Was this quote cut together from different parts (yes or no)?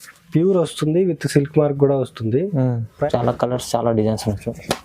yes